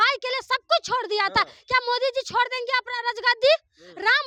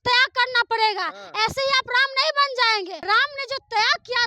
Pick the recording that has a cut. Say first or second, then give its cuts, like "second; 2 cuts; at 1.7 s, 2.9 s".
second; 1 cut; at 3.0 s